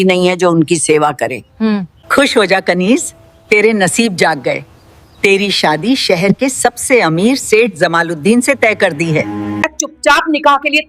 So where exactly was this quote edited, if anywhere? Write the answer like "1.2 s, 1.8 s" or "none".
1.6 s, 9.4 s